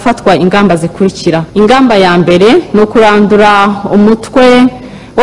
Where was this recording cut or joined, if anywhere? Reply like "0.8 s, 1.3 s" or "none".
1.5 s